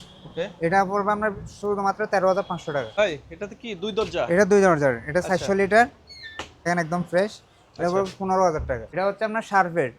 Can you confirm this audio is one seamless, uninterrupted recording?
no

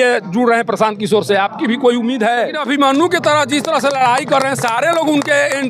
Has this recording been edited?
yes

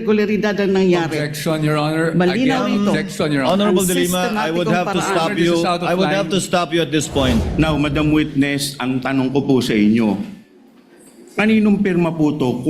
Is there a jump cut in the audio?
yes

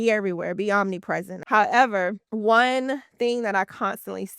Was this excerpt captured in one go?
no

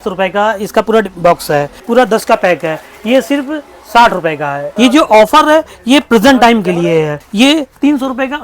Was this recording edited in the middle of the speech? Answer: yes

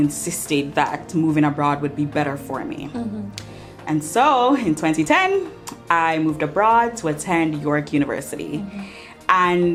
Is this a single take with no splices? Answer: yes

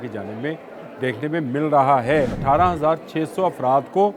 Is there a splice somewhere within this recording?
yes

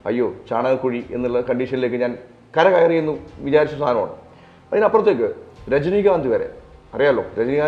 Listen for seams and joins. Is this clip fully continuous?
yes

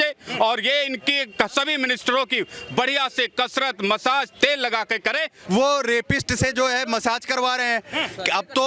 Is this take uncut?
no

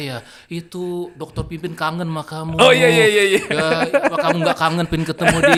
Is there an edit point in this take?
no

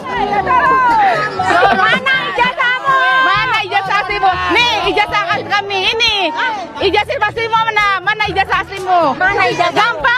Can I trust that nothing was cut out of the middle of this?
yes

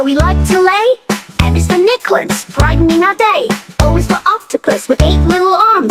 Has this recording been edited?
no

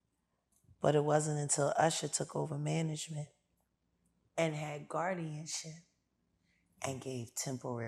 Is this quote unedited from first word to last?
yes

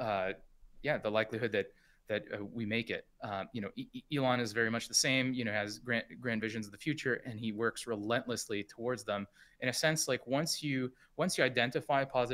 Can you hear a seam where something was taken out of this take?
no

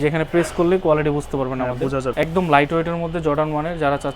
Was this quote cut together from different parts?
yes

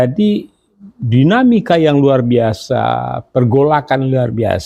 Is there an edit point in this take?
no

